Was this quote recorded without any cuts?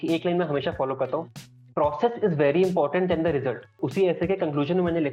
no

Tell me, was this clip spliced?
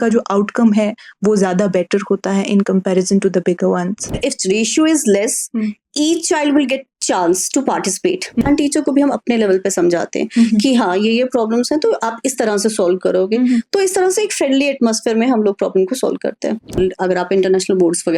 yes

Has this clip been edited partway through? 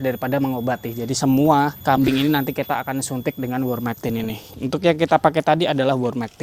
no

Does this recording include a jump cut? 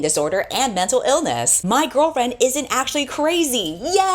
yes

